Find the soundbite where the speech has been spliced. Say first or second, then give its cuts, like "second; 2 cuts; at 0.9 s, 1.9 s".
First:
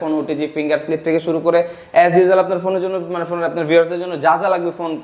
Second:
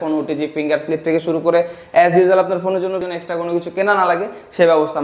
second; 1 cut; at 3.1 s